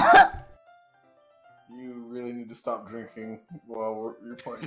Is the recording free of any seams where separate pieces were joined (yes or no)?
yes